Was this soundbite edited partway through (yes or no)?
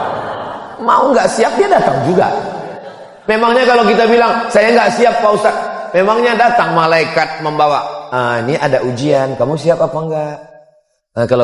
no